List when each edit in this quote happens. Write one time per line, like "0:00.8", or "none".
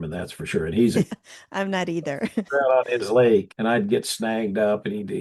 0:01.1
0:03.5